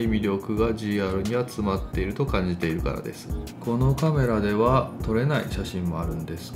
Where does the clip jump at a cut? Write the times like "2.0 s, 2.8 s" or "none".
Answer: 3.4 s